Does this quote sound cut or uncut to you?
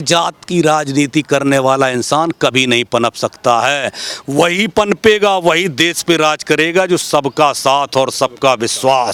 uncut